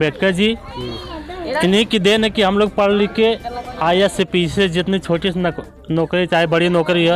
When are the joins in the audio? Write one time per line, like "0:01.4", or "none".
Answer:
none